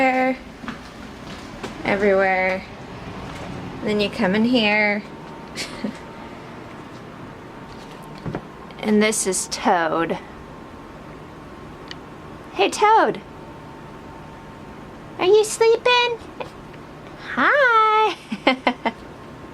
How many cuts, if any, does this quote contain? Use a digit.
1